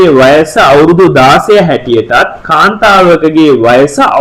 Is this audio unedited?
yes; 0 cuts

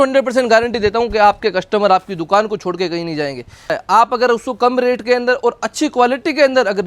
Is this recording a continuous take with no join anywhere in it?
no; 1 cut; at 3.8 s

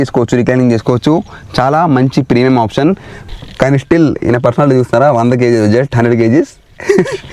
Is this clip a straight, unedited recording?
no; 1 cut; at 3.1 s

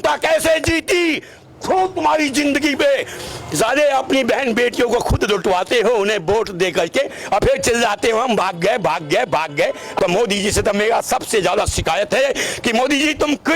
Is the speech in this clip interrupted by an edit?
yes; 1 cut; at 9.9 s

